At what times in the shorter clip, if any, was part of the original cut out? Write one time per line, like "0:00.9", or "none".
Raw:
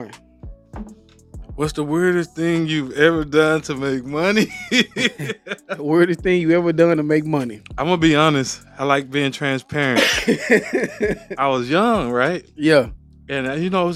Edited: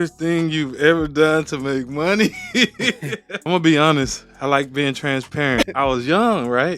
0:03.3
0:05.7